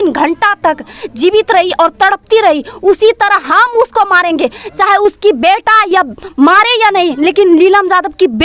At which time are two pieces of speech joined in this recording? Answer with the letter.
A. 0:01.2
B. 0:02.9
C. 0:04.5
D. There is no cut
D